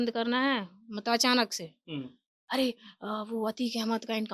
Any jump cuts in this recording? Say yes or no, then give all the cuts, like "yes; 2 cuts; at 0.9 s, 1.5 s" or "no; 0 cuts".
yes; 1 cut; at 2.3 s